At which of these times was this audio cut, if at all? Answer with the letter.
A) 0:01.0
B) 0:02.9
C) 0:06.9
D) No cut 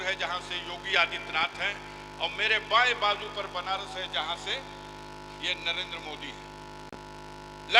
C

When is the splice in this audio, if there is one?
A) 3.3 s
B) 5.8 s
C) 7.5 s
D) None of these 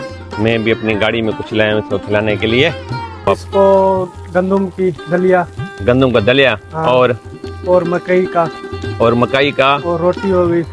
A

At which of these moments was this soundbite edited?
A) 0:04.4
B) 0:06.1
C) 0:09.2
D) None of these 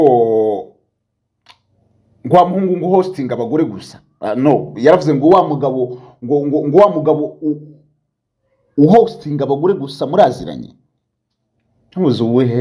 D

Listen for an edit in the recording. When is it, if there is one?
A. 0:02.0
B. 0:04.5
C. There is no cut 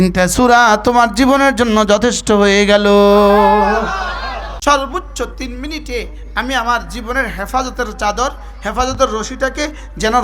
B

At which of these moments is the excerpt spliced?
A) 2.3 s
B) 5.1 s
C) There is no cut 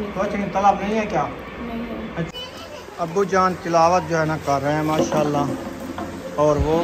A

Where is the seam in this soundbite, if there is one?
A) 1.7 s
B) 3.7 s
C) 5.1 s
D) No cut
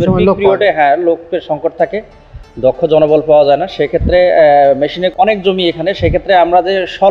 D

